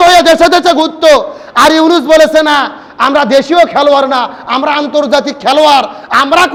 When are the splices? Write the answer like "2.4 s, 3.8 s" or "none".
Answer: none